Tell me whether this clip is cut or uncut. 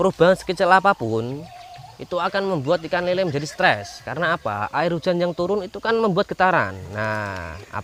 uncut